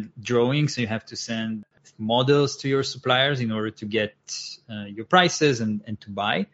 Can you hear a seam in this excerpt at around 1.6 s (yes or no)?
yes